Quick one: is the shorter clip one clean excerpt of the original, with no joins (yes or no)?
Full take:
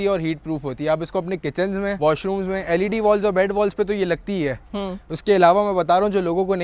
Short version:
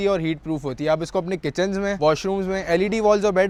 yes